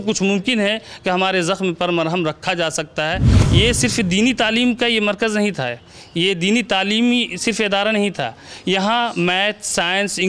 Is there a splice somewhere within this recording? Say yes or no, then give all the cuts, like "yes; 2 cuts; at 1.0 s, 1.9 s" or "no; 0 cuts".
yes; 1 cut; at 3.3 s